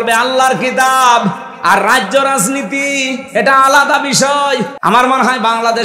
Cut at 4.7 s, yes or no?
yes